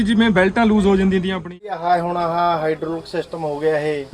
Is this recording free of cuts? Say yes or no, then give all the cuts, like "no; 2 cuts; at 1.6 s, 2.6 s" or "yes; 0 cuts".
no; 1 cut; at 1.5 s